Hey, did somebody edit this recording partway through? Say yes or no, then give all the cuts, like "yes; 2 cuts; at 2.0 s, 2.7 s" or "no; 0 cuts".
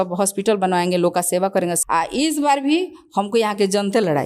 yes; 1 cut; at 1.8 s